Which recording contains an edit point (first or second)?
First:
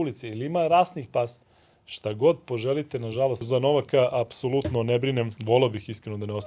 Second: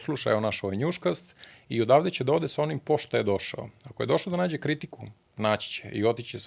first